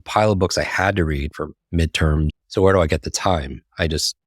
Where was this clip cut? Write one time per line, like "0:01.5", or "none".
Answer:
0:01.3
0:02.3